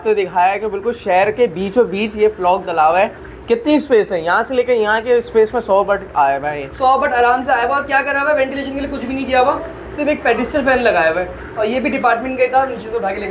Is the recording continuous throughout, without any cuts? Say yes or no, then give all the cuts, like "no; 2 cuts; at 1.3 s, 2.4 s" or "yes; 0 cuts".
yes; 0 cuts